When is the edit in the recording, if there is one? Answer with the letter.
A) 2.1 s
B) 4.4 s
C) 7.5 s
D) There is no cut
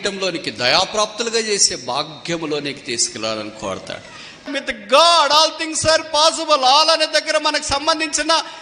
B